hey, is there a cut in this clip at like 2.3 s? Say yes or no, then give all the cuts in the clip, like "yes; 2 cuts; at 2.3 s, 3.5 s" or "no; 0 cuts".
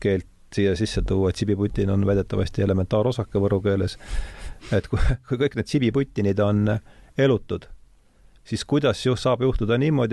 no; 0 cuts